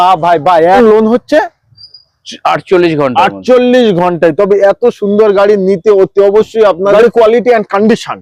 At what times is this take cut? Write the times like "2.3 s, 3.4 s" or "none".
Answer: 0.8 s, 6.9 s